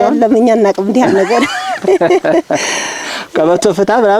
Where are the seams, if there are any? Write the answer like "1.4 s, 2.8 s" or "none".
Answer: none